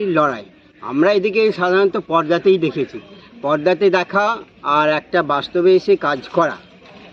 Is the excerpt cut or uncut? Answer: uncut